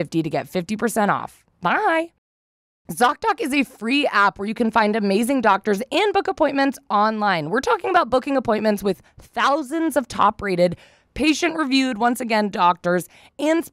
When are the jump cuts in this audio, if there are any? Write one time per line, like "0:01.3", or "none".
0:02.7